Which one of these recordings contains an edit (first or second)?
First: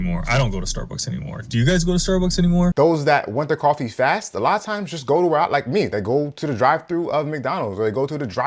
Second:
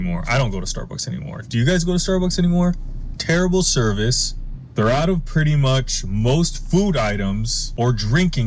first